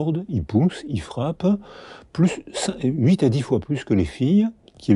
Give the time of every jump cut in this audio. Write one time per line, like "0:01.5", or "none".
none